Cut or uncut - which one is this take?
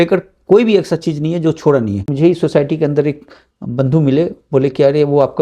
cut